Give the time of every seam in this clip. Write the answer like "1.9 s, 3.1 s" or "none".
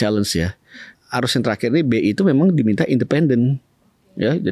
0.9 s